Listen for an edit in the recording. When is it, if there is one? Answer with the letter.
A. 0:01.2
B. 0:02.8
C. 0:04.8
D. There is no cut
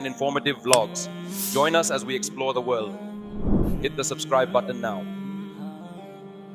D